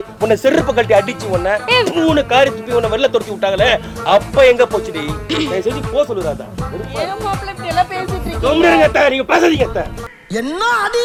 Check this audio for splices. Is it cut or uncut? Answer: uncut